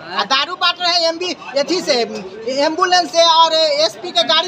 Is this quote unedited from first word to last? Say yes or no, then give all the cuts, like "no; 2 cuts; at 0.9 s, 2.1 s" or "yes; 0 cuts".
yes; 0 cuts